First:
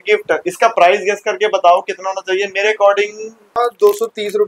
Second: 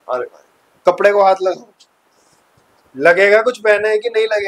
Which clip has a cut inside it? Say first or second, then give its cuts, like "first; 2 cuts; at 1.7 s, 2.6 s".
first; 1 cut; at 3.5 s